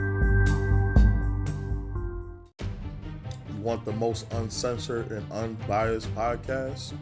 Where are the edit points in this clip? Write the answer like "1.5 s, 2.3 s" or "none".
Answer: 2.4 s